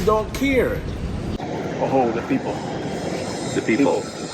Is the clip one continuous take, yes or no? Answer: no